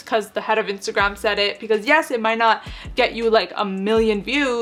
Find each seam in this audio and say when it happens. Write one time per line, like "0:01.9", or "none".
none

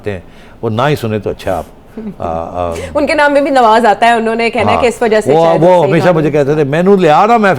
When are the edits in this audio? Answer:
none

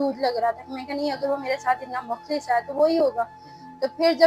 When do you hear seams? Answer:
none

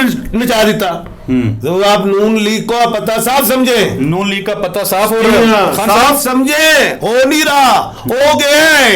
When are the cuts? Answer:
0:01.6

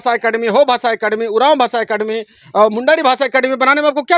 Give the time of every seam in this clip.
none

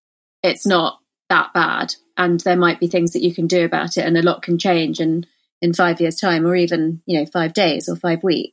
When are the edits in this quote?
none

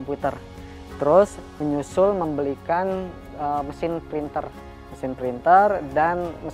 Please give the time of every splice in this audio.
none

